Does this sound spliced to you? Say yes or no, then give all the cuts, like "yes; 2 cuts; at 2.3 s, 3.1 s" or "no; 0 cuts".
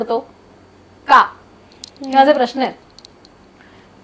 no; 0 cuts